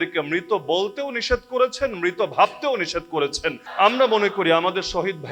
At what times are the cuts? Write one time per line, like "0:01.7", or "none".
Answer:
0:03.6